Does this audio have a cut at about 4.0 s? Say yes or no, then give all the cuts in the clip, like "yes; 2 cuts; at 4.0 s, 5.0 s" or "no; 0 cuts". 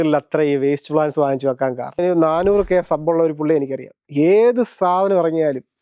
no; 1 cut; at 2.0 s